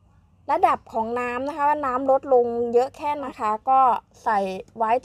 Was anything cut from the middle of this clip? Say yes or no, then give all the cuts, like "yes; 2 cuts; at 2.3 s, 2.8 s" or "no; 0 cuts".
yes; 1 cut; at 3.3 s